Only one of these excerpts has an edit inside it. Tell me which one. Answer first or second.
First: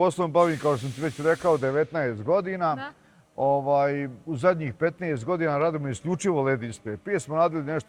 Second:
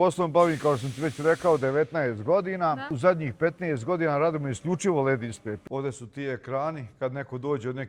second